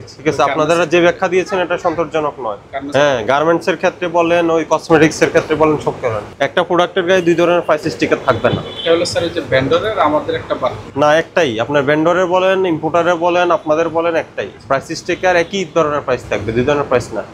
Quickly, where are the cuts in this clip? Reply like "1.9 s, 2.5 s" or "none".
none